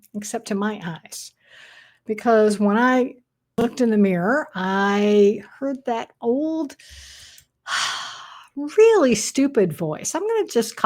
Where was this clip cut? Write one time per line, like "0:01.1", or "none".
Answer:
0:03.6

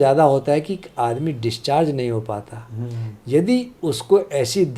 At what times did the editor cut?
none

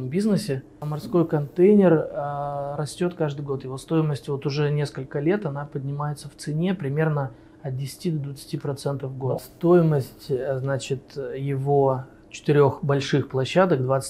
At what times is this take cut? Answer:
0:01.0
0:09.4

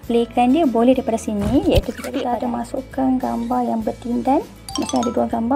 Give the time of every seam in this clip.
0:02.2

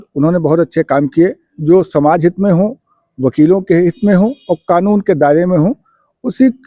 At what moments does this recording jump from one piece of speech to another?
0:01.5

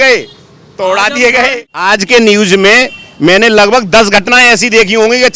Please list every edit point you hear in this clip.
0:01.6

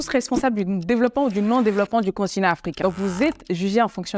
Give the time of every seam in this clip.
0:02.7

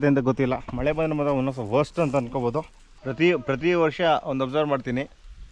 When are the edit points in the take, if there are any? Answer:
0:03.1

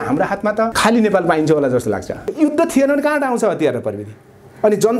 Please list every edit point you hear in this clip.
0:02.3

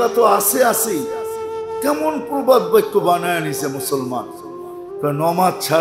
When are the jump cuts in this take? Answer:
none

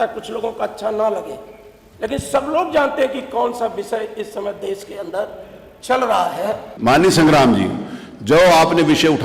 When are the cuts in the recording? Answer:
0:06.7

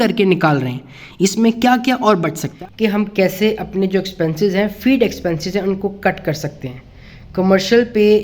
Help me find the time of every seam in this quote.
0:02.4

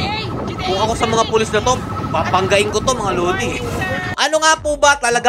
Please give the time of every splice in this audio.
0:01.9
0:04.1

